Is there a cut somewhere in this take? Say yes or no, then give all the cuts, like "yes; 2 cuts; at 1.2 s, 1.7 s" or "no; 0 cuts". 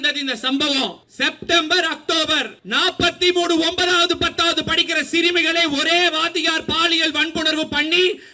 yes; 2 cuts; at 1.1 s, 2.6 s